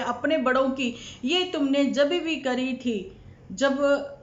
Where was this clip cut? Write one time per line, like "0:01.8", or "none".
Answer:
none